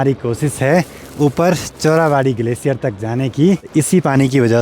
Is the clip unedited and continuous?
no; 1 cut; at 3.7 s

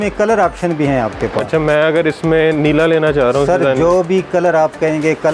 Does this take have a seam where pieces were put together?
no; 0 cuts

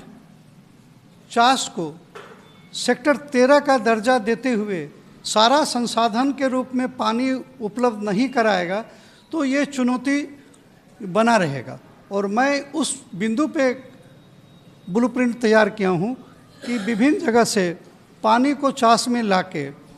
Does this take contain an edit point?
no; 0 cuts

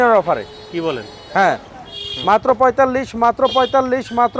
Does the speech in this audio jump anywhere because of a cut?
yes; 1 cut; at 2.0 s

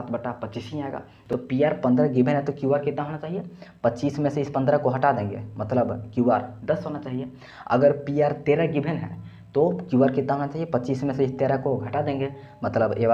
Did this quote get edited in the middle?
yes; 1 cut; at 1.1 s

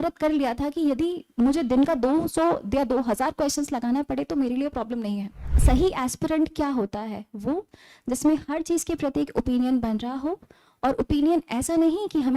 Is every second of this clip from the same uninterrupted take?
no; 1 cut; at 5.5 s

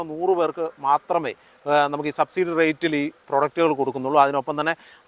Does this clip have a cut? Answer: no; 0 cuts

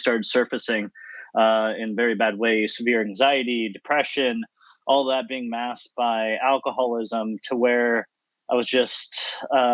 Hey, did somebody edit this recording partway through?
no; 0 cuts

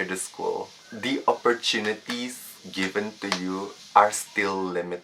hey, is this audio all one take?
no; 1 cut; at 3.8 s

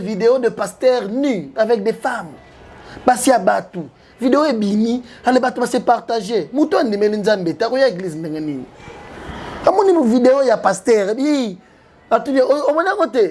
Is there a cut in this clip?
no; 0 cuts

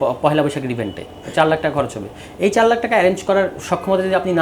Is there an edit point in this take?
no; 0 cuts

